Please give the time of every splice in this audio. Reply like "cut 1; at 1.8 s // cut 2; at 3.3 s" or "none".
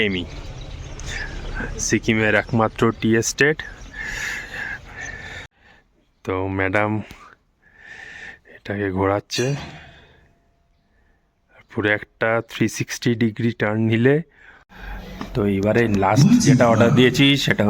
cut 1; at 5.4 s // cut 2; at 14.8 s